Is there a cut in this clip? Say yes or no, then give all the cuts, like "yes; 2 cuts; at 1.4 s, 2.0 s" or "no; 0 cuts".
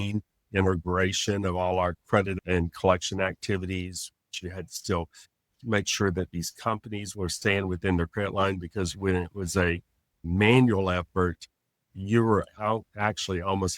yes; 1 cut; at 4.4 s